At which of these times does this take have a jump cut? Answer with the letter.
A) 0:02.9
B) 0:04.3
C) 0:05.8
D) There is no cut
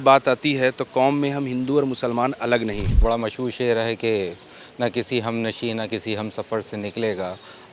A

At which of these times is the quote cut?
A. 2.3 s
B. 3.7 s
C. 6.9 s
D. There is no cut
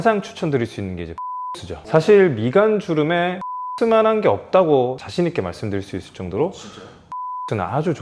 B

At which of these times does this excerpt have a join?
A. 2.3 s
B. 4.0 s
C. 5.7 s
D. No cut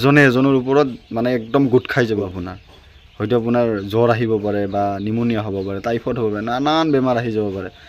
A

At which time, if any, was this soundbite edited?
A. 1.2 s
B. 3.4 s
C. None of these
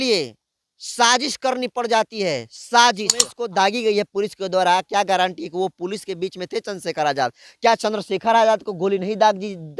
B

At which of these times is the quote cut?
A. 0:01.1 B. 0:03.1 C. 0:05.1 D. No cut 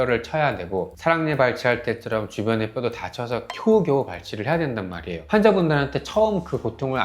C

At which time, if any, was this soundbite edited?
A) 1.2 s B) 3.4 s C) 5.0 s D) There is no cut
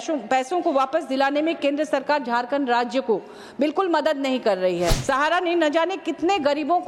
C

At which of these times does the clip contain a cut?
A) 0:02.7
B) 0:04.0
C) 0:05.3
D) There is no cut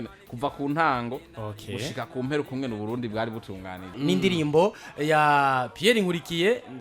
B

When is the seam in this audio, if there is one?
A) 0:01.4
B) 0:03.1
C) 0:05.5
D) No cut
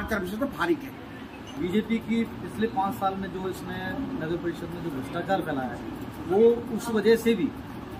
A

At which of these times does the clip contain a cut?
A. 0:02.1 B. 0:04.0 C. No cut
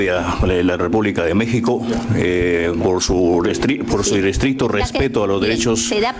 C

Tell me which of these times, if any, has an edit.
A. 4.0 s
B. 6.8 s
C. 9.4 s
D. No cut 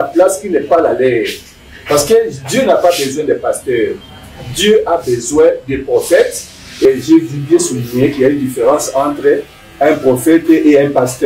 B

